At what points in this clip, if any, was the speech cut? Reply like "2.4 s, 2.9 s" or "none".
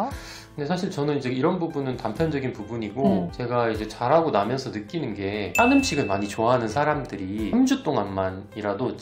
3.4 s, 5.6 s, 7.5 s

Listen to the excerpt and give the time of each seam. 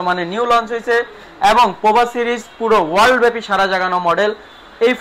none

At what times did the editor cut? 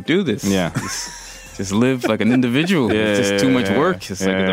none

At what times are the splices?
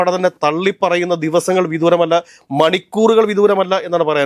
none

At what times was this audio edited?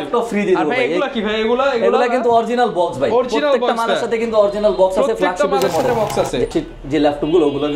6.5 s

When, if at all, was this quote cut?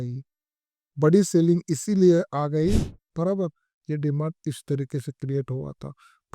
3.0 s

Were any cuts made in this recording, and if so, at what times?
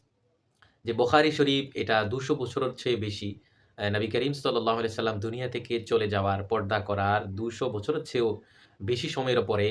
none

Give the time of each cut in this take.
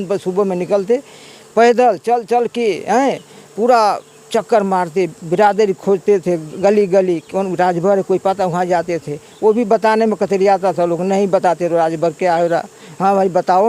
none

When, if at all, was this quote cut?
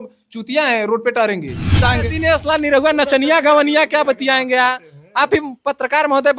1.8 s

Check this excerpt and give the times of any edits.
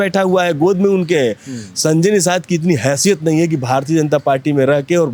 none

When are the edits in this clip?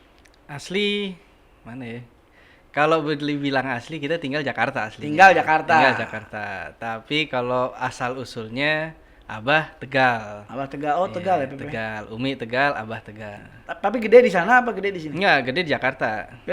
13.3 s

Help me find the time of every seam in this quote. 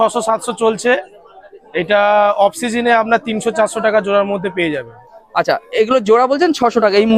none

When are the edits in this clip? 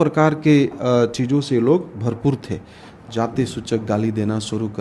2.8 s

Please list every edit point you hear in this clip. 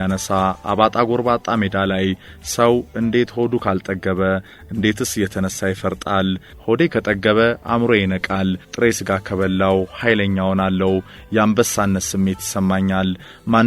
6.5 s

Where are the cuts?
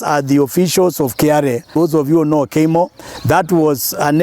1.7 s

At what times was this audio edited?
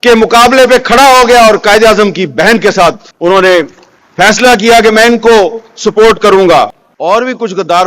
6.9 s

